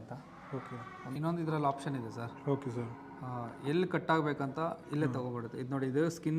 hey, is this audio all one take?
no; 1 cut; at 1.1 s

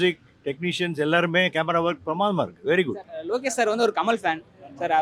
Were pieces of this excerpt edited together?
yes; 1 cut; at 3.1 s

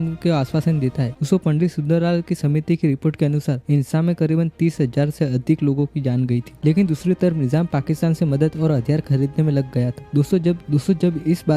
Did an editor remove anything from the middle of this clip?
yes; 2 cuts; at 1.2 s, 6.5 s

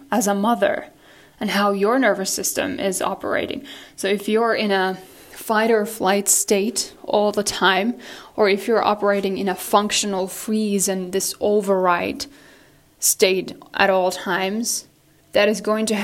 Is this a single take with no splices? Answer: yes; 0 cuts

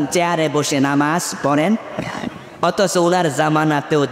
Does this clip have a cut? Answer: no; 0 cuts

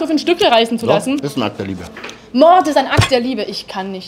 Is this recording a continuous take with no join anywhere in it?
yes; 0 cuts

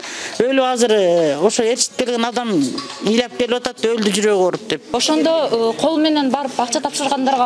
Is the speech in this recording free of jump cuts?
yes; 0 cuts

